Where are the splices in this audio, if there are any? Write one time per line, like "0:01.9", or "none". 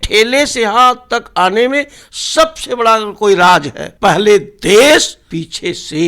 0:03.8
0:05.2